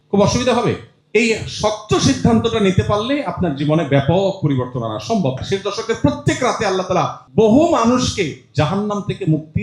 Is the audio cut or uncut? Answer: cut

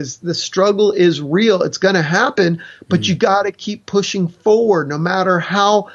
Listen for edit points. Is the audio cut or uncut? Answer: uncut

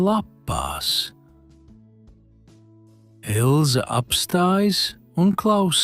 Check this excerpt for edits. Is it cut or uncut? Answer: cut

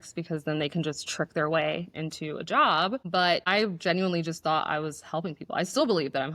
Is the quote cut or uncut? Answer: cut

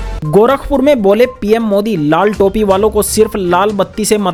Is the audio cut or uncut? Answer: uncut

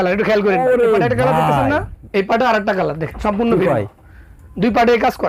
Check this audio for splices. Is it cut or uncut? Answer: cut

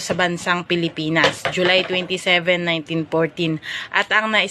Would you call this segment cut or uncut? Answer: cut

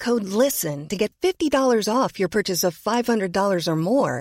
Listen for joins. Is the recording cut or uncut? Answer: uncut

